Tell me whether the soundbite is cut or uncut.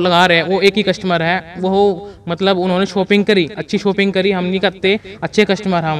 uncut